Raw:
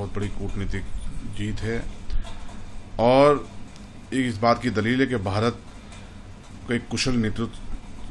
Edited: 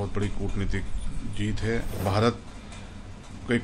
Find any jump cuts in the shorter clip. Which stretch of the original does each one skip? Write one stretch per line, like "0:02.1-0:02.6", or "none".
0:02.0-0:05.2

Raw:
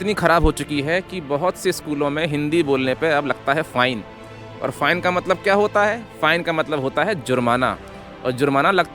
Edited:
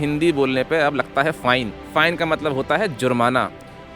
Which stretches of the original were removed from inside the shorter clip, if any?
0:04.1-0:06.1

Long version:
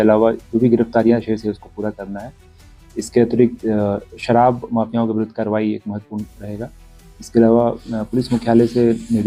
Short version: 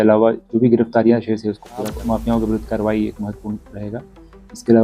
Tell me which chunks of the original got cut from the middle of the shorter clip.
0:02.0-0:04.6

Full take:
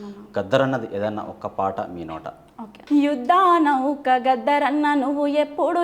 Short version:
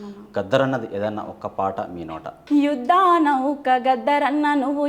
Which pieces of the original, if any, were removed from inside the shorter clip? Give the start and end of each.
0:02.3-0:02.7

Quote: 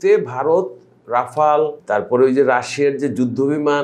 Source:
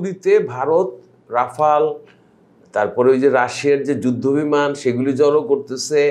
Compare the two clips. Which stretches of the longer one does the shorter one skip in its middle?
0:02.0-0:02.6

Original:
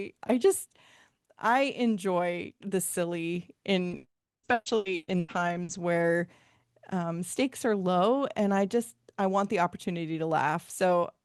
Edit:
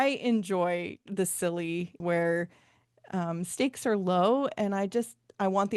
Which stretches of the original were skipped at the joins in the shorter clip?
0:03.5-0:05.7

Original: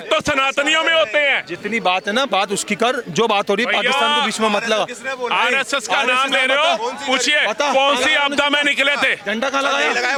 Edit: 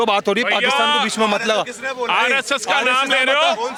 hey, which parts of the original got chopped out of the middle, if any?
none

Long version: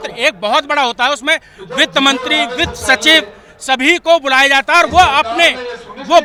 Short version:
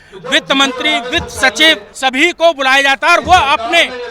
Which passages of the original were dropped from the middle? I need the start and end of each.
0:03.3-0:03.5

